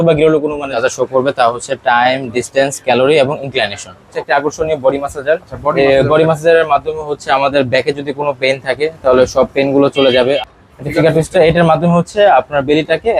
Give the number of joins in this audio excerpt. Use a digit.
3